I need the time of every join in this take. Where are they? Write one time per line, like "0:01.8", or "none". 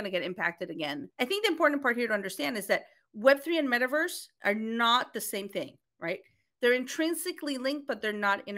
0:01.0